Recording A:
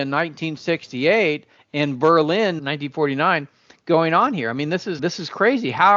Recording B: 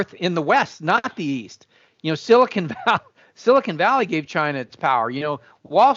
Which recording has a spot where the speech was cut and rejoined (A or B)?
A